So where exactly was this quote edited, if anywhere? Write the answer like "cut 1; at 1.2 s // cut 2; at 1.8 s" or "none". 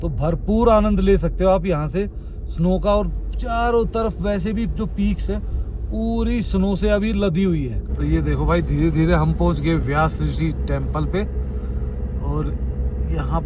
cut 1; at 7.9 s

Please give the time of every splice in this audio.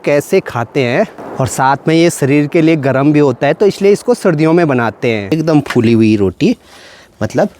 cut 1; at 1.2 s // cut 2; at 5.3 s

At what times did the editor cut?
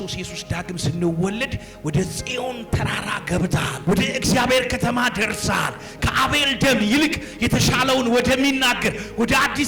cut 1; at 3.7 s

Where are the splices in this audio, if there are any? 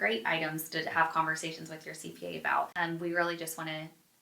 cut 1; at 2.7 s

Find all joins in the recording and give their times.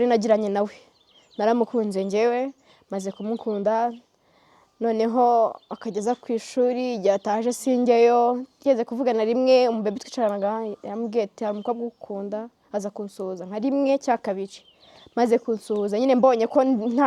none

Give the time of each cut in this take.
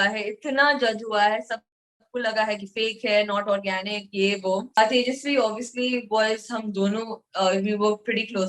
cut 1; at 4.8 s

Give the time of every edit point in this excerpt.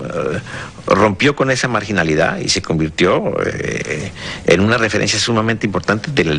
cut 1; at 4.7 s

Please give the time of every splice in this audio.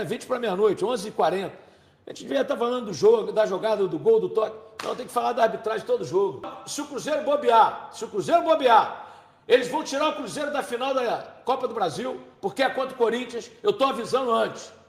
none

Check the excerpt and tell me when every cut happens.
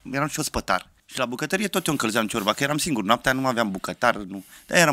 cut 1; at 1.0 s

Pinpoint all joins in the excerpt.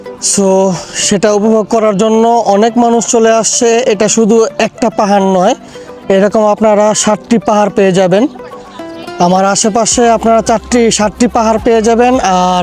none

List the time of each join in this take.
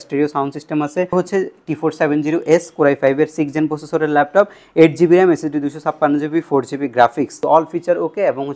cut 1; at 1.1 s // cut 2; at 7.4 s

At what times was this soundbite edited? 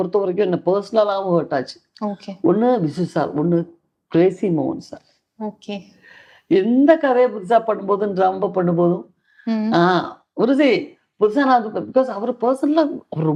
none

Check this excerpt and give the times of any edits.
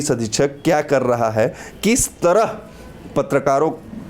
none

